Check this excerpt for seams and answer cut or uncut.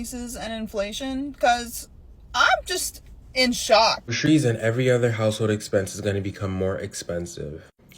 cut